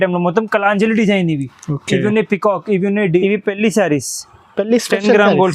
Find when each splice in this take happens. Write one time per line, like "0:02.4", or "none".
0:03.1